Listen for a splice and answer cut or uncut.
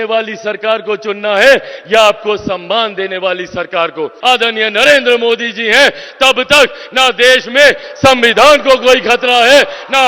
cut